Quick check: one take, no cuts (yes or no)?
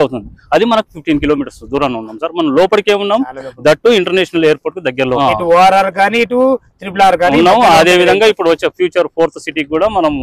no